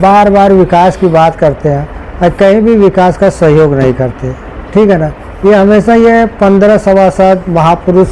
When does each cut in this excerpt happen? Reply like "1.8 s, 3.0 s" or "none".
none